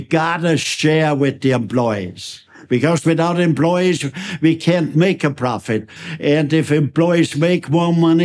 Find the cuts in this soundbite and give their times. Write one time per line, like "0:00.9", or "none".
none